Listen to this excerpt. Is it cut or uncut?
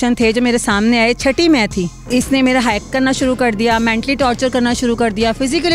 cut